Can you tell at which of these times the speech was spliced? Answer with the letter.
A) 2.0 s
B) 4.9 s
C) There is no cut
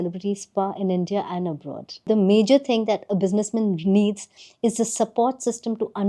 A